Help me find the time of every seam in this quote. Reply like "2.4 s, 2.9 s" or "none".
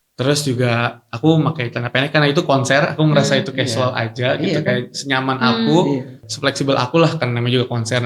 6.3 s